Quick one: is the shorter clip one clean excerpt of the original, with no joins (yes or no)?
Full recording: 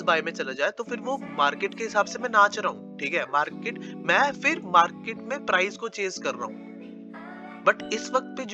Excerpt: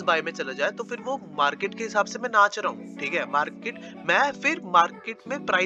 yes